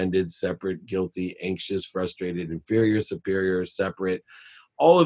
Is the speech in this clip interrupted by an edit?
no; 0 cuts

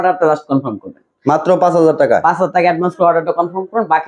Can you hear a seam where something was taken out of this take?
no; 0 cuts

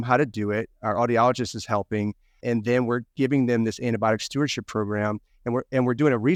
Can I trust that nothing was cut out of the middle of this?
yes; 0 cuts

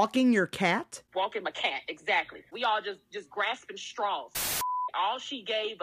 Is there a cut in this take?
yes; 3 cuts; at 1.0 s, 2.4 s, 4.8 s

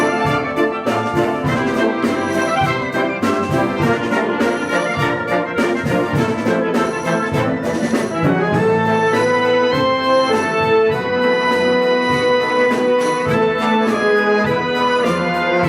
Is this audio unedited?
no; 1 cut; at 13.7 s

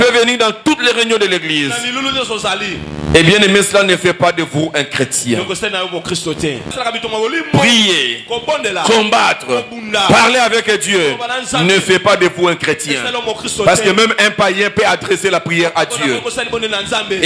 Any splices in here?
yes; 1 cut; at 6.7 s

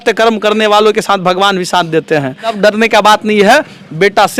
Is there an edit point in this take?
yes; 1 cut; at 2.6 s

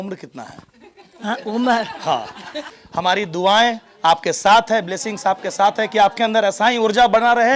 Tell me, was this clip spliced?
yes; 1 cut; at 2.7 s

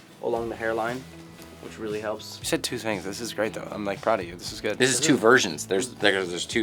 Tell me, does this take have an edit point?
no; 0 cuts

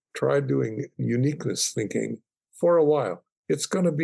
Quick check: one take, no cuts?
yes; 0 cuts

